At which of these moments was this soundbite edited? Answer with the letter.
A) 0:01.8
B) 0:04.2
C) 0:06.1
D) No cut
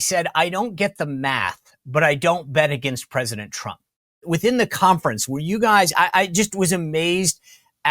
B